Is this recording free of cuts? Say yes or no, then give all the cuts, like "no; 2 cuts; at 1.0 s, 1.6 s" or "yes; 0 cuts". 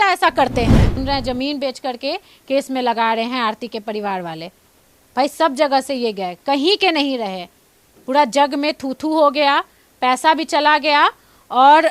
no; 1 cut; at 0.9 s